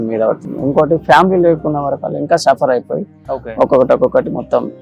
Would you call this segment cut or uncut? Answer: uncut